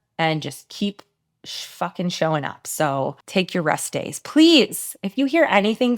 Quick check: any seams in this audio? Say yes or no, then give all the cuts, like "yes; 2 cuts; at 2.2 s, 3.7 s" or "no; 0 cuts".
yes; 1 cut; at 3.2 s